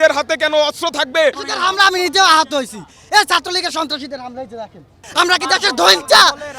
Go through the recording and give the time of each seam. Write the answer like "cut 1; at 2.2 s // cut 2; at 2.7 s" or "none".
cut 1; at 5.0 s